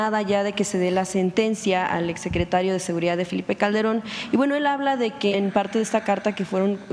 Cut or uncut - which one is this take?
cut